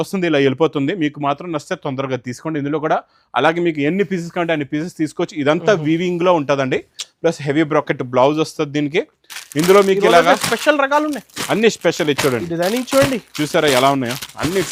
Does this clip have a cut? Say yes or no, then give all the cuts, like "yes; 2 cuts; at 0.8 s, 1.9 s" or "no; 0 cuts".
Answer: no; 0 cuts